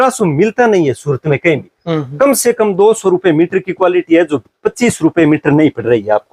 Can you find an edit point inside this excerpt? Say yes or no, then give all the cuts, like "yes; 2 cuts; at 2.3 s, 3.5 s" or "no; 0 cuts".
no; 0 cuts